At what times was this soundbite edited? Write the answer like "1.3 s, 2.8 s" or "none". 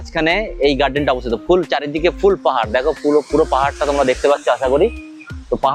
none

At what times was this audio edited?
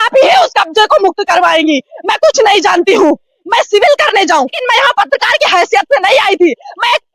4.6 s

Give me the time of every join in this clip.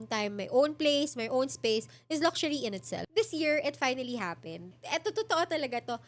3.1 s, 4.8 s

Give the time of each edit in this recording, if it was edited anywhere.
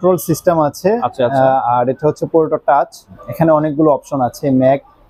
none

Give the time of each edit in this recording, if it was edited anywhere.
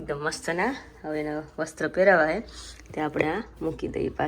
none

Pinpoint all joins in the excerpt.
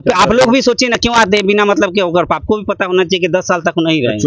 none

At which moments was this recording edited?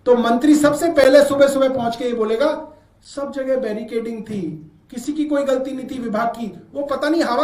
none

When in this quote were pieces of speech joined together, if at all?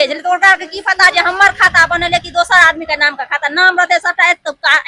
none

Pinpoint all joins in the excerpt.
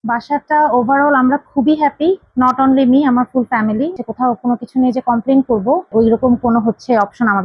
4.0 s, 5.9 s

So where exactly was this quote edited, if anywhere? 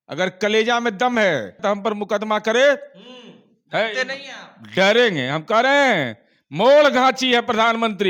1.6 s

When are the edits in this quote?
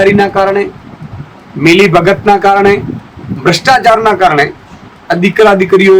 none

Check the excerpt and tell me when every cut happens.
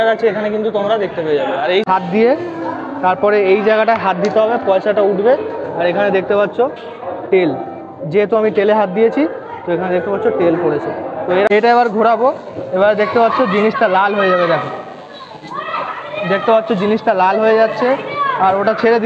1.8 s, 11.5 s

